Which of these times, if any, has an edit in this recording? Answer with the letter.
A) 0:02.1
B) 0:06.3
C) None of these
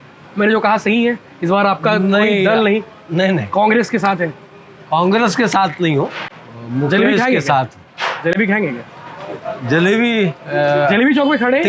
C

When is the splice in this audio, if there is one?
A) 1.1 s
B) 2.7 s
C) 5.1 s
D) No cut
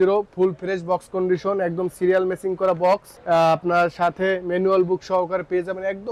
D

